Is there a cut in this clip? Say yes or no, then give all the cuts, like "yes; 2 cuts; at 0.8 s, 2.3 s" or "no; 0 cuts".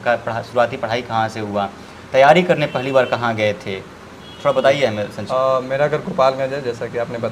no; 0 cuts